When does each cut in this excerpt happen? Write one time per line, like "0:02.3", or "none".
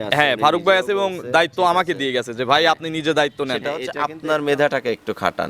0:03.8